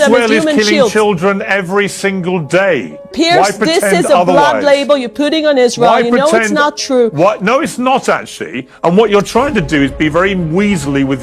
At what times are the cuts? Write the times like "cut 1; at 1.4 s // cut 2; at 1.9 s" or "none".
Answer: none